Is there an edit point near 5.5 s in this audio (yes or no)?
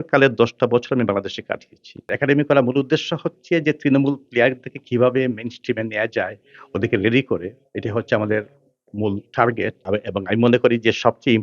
no